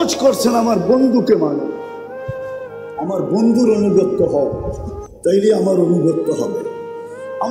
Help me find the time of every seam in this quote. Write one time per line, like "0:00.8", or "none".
0:01.7
0:03.0